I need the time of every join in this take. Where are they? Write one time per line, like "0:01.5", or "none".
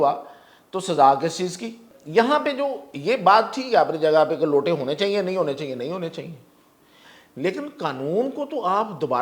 0:01.9

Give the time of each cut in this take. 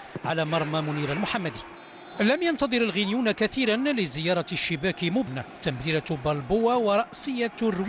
0:02.6

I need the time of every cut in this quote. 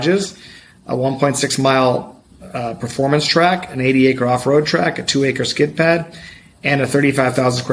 none

